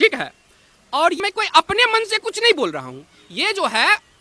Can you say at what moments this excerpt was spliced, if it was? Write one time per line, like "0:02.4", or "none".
0:01.2